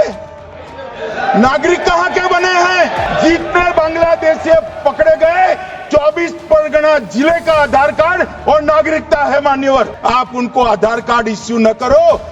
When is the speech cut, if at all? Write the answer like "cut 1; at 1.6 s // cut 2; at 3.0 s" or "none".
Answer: cut 1; at 3.0 s // cut 2; at 9.9 s